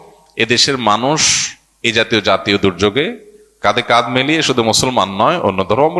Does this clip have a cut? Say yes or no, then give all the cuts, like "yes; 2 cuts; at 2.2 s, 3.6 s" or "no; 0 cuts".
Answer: no; 0 cuts